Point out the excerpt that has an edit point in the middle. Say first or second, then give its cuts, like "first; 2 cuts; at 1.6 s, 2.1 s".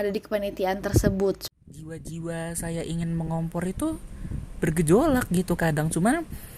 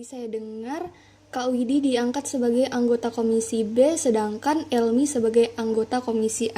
first; 1 cut; at 1.4 s